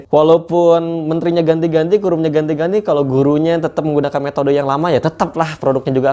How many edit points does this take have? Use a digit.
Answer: 0